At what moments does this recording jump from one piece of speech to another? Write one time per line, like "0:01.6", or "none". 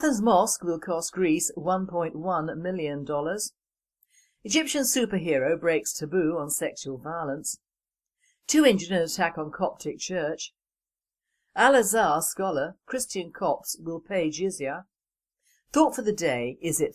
none